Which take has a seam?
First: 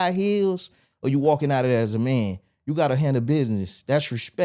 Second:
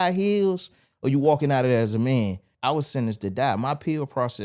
second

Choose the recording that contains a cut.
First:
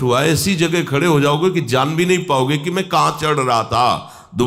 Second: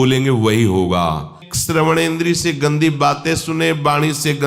second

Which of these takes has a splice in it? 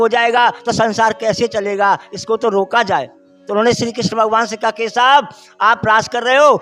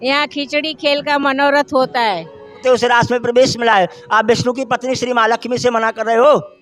second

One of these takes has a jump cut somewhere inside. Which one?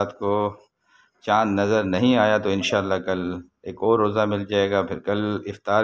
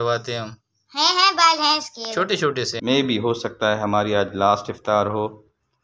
second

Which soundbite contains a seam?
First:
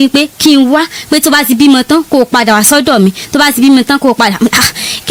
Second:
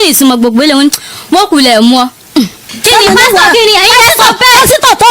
second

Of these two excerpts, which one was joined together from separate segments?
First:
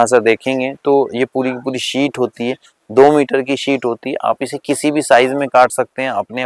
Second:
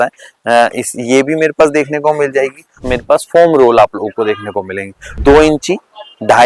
second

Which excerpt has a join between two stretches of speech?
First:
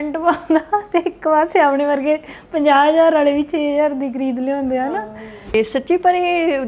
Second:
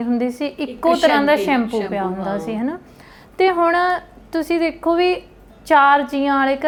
first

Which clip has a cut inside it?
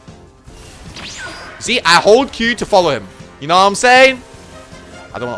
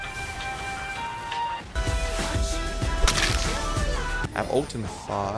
second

